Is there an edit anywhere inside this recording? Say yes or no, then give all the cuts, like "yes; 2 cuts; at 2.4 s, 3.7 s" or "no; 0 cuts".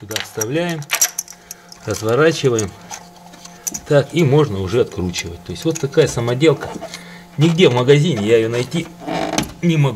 no; 0 cuts